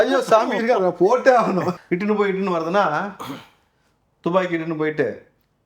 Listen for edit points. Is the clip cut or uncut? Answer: cut